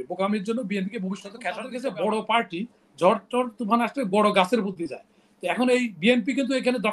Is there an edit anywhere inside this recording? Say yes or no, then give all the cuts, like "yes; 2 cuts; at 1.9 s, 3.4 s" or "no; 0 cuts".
yes; 1 cut; at 1.7 s